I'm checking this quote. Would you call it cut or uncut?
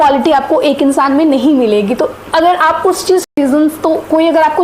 cut